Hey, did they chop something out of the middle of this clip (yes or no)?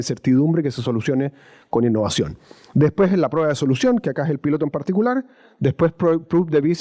no